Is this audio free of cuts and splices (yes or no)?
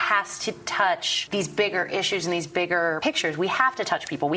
no